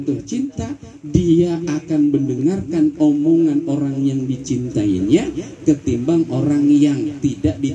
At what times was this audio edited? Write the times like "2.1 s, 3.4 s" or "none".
none